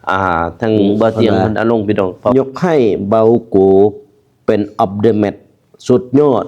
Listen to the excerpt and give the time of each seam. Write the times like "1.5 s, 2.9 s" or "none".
2.3 s